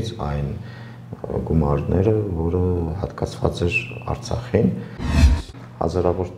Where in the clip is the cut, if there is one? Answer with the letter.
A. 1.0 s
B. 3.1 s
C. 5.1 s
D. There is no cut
C